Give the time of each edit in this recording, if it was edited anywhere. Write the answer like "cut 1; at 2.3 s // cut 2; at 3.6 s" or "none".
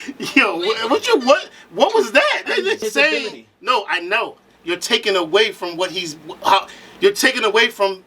cut 1; at 2.8 s